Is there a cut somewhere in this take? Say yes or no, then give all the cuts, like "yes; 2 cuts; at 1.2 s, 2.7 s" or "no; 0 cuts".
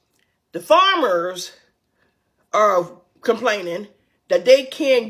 no; 0 cuts